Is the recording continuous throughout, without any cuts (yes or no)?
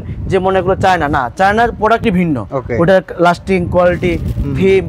no